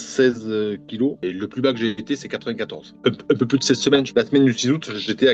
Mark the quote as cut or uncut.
uncut